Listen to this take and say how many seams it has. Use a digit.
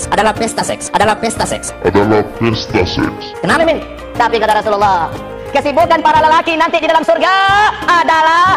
1